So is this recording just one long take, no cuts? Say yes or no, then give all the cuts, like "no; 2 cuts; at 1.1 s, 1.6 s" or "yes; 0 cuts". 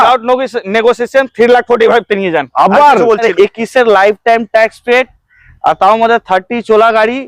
no; 1 cut; at 3.3 s